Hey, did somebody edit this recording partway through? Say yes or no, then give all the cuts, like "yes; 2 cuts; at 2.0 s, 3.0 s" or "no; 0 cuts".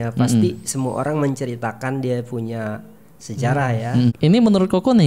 yes; 1 cut; at 4.1 s